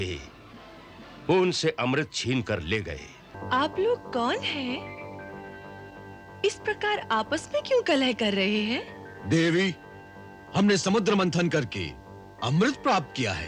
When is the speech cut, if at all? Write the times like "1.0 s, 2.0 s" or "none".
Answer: 3.3 s